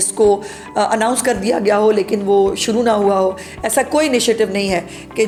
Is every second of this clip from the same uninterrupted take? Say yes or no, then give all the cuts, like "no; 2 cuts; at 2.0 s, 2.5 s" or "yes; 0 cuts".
yes; 0 cuts